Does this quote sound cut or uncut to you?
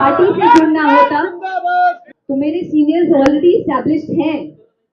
cut